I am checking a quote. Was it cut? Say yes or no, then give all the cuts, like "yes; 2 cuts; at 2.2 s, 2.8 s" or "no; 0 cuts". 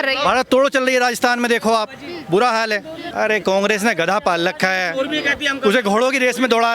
yes; 1 cut; at 3.0 s